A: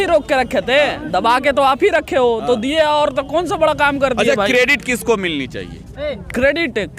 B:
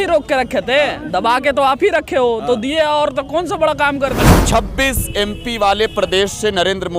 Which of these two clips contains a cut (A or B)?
B